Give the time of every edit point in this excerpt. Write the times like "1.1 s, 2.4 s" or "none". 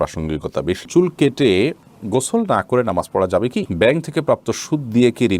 0.9 s, 3.7 s